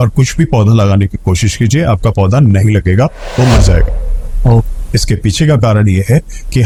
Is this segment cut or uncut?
uncut